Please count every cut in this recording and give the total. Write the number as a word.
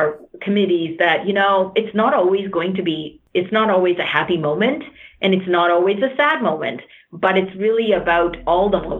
one